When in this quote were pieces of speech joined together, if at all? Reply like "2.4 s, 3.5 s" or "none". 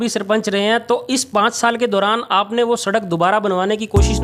none